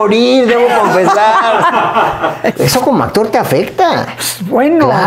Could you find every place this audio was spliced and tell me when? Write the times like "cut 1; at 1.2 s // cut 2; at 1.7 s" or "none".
cut 1; at 2.5 s